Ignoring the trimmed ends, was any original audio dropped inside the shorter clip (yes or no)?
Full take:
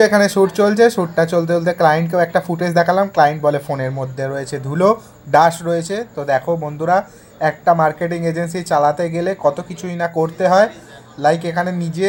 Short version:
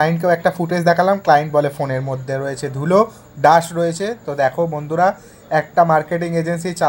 no